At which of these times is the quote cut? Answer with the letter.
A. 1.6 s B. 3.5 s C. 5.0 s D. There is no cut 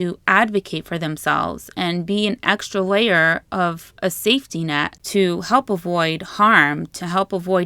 C